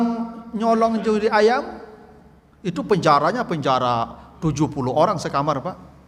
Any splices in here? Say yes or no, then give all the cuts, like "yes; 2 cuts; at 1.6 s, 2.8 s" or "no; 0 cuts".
no; 0 cuts